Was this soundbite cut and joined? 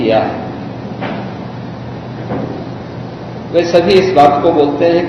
no; 0 cuts

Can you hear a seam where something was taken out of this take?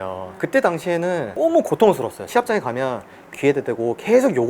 yes; 2 cuts; at 2.3 s, 3.3 s

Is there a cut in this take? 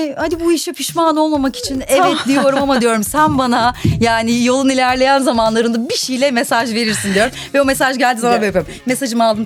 no; 0 cuts

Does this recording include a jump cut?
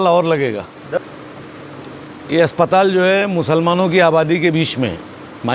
yes; 1 cut; at 1.0 s

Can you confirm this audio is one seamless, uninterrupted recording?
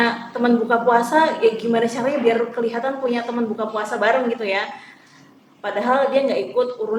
yes; 0 cuts

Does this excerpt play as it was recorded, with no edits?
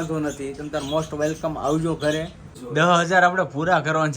no; 1 cut; at 2.6 s

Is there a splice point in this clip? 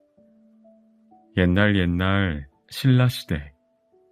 yes; 1 cut; at 1.0 s

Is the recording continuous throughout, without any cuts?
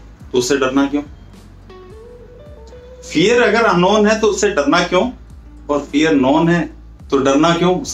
yes; 0 cuts

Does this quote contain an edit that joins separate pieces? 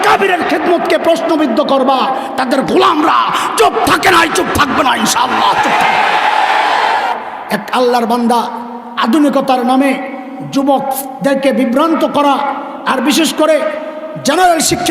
yes; 1 cut; at 7.2 s

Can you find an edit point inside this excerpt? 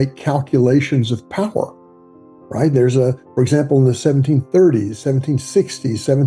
no; 0 cuts

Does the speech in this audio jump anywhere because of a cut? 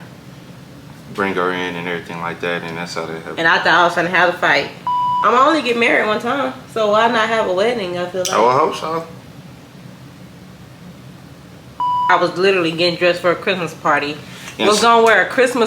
yes; 2 cuts; at 5.1 s, 12.1 s

